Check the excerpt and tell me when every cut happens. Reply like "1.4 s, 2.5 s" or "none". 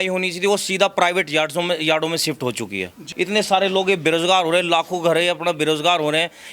3.0 s

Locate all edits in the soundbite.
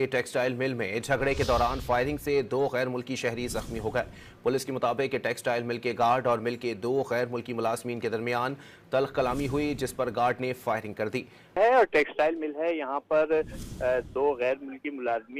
none

